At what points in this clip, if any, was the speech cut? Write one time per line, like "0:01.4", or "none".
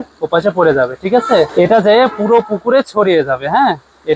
none